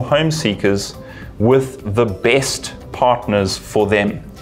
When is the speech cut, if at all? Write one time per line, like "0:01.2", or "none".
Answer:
none